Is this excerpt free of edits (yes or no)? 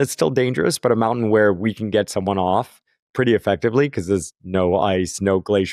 yes